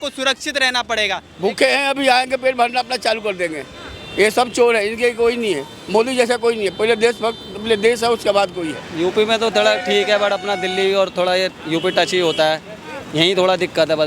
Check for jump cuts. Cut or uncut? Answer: cut